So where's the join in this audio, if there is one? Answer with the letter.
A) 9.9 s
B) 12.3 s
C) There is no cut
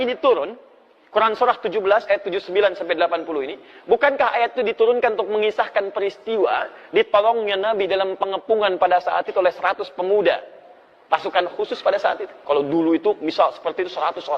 B